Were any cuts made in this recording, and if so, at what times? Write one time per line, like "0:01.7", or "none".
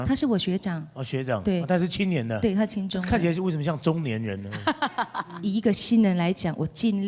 0:05.4